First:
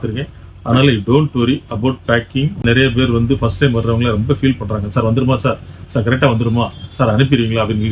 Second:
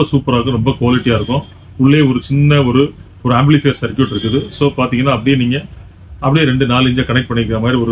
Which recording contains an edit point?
first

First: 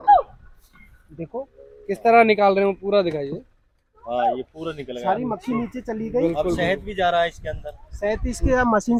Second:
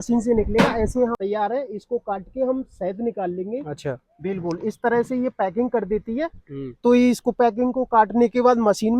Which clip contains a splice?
second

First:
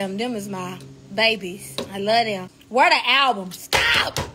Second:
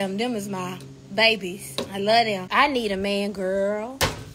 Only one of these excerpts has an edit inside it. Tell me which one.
second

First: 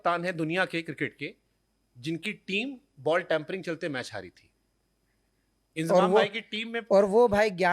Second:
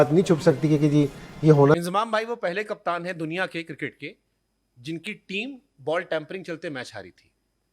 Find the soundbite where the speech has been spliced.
second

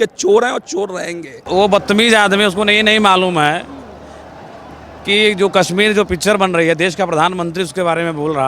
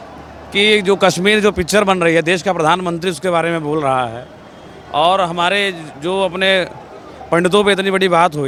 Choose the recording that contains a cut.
first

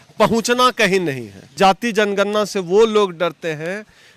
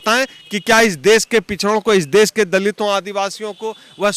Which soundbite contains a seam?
first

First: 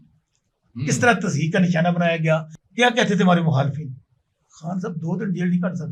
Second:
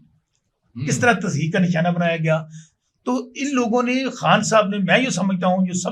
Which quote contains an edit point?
first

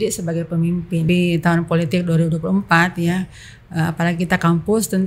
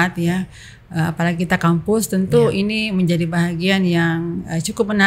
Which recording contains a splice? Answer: first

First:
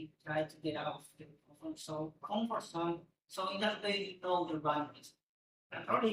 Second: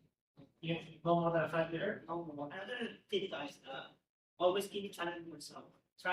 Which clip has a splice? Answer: second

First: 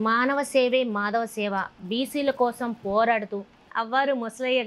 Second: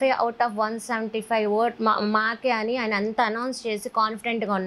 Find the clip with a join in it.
first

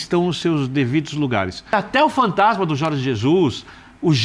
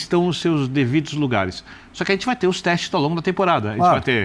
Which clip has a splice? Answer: first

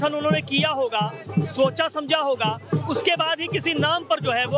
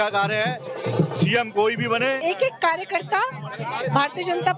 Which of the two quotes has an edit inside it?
second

